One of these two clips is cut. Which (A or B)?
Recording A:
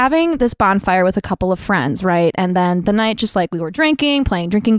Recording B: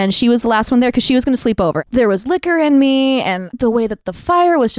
B